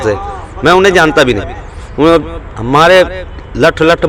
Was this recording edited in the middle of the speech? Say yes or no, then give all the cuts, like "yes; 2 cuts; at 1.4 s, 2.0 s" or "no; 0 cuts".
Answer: no; 0 cuts